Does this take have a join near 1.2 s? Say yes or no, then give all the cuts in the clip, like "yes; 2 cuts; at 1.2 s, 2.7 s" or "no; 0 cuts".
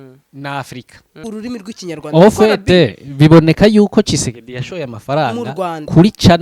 yes; 1 cut; at 1.2 s